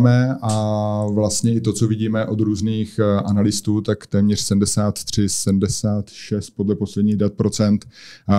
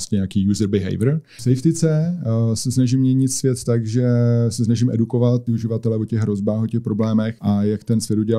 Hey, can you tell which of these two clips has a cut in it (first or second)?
second